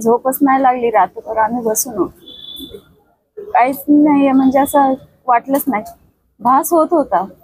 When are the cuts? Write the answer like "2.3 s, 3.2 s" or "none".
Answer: none